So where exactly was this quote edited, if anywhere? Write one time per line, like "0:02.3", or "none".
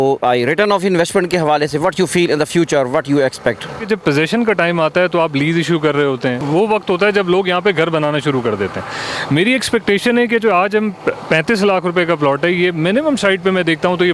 0:03.8
0:06.4